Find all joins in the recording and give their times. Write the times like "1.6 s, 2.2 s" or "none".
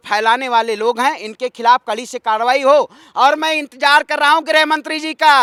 none